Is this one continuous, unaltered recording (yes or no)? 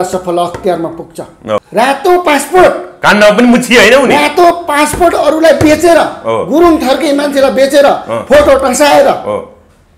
no